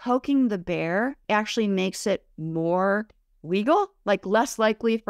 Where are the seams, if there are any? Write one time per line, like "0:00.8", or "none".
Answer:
0:01.2